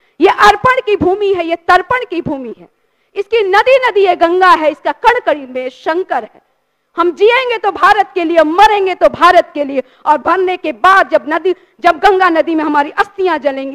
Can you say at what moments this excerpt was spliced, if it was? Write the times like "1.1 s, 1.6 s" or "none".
none